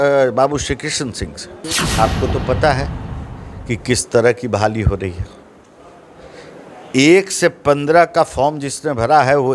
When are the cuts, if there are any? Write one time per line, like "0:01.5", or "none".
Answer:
0:01.8